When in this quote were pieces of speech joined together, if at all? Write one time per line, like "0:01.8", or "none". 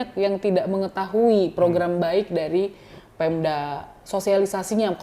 none